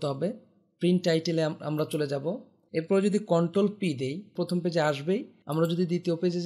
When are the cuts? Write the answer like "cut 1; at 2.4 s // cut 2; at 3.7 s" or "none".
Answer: cut 1; at 2.5 s // cut 2; at 4.3 s // cut 3; at 5.4 s